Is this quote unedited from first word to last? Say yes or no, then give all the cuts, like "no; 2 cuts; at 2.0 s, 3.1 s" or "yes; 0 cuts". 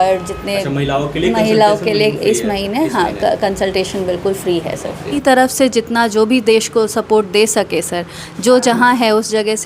no; 1 cut; at 5.2 s